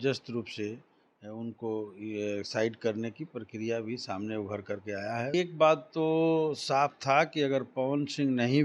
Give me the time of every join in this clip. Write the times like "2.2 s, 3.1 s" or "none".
5.3 s